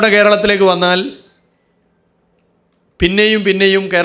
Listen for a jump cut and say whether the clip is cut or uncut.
uncut